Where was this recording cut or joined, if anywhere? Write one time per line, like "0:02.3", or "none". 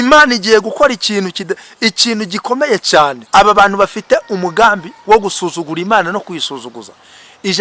0:03.2